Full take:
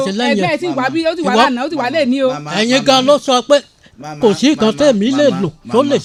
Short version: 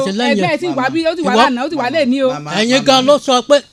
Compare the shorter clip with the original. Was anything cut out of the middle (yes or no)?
no